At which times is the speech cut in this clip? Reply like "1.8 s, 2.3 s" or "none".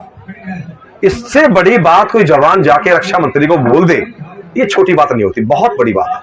none